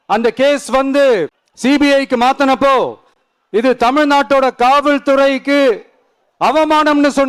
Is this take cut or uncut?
cut